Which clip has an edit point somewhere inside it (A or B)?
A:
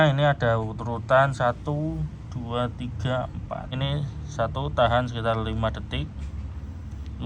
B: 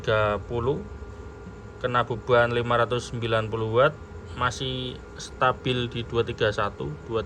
A